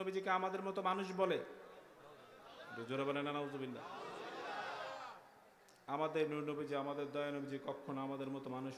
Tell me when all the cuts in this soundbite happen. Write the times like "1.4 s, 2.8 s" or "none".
none